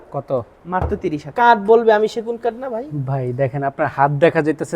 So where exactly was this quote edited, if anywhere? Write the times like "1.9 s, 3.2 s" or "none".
1.2 s

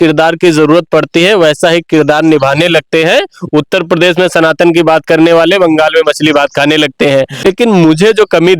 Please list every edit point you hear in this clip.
7.4 s

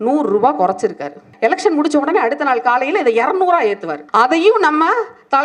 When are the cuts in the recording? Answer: 1.3 s, 3.9 s

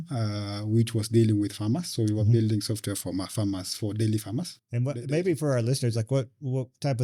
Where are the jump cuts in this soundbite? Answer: none

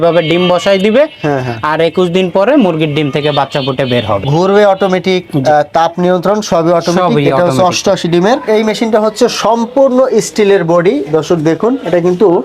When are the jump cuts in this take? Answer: 8.5 s

